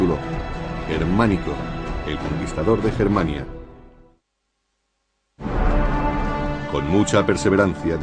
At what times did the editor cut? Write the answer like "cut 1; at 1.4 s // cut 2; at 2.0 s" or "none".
cut 1; at 5.9 s